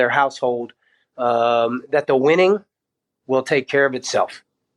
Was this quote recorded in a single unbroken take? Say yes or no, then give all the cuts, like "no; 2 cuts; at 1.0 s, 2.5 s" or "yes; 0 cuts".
yes; 0 cuts